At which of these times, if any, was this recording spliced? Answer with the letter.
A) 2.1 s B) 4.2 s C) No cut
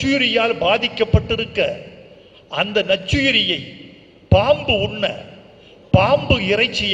C